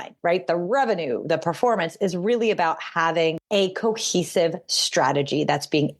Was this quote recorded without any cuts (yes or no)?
no